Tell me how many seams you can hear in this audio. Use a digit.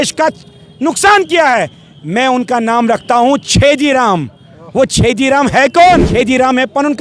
1